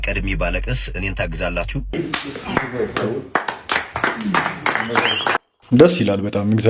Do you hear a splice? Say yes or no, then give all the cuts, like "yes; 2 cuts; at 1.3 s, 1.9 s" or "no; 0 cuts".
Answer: yes; 1 cut; at 1.9 s